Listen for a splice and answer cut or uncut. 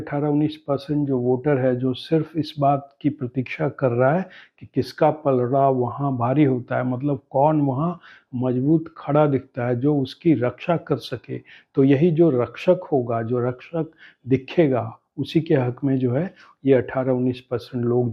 uncut